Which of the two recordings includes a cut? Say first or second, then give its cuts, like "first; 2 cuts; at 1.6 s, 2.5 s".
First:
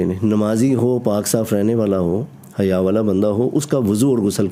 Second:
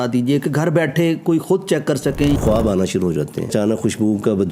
second; 2 cuts; at 2.4 s, 3.5 s